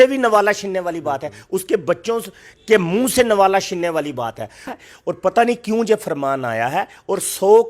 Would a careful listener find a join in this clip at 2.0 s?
no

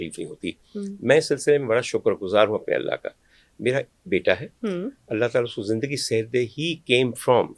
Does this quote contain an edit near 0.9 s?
no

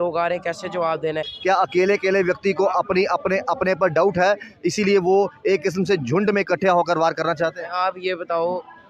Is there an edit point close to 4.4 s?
no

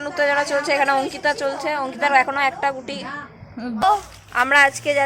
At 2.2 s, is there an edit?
no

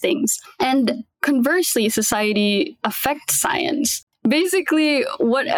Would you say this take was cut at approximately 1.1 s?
yes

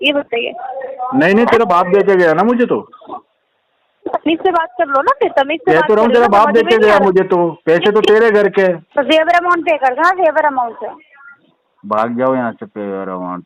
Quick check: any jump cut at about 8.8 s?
yes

